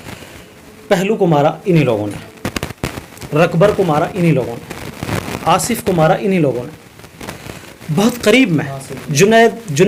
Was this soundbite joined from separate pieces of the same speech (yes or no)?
no